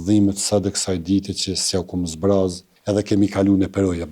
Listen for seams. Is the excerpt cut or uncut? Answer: cut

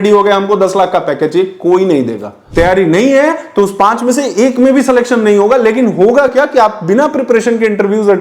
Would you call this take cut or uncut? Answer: cut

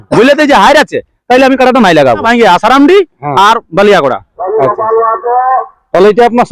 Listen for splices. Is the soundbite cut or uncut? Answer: cut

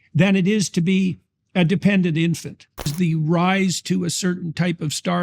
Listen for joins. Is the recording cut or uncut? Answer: cut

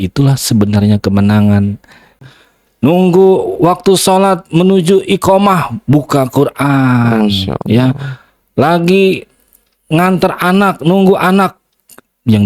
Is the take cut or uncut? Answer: cut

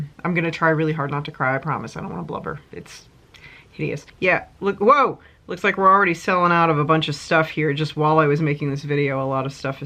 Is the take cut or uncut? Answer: cut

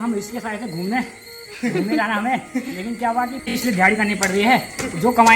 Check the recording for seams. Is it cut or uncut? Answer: cut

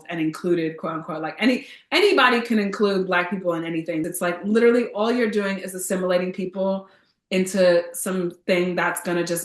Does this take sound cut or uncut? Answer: cut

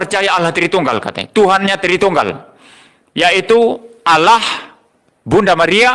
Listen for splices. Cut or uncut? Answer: uncut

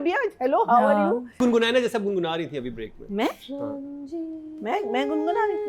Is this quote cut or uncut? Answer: cut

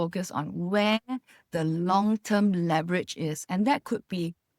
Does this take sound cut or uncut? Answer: uncut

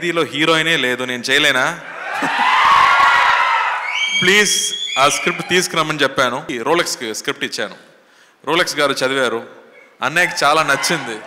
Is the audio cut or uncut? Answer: cut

